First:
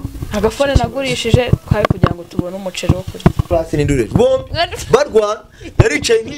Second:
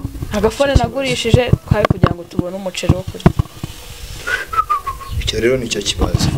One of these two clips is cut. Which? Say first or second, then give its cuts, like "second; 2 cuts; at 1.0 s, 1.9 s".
first; 1 cut; at 3.5 s